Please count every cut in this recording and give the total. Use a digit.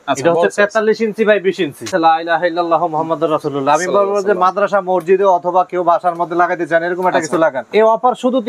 2